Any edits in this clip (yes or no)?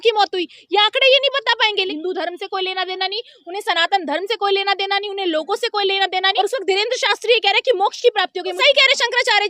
yes